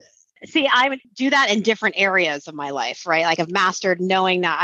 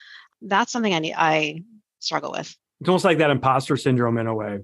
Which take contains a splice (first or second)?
first